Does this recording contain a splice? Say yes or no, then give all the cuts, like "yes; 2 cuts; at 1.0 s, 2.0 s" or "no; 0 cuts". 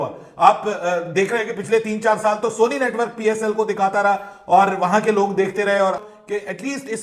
yes; 1 cut; at 6.1 s